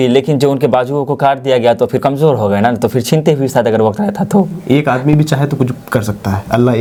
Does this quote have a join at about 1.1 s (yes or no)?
no